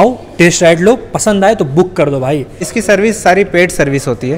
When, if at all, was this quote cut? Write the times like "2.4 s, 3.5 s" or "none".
2.7 s